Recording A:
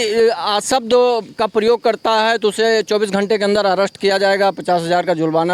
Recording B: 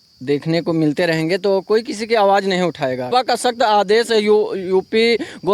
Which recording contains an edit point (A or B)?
B